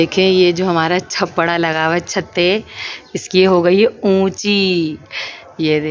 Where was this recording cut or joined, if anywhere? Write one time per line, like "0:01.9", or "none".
none